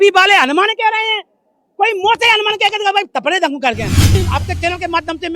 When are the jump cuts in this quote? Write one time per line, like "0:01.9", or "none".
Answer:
0:04.1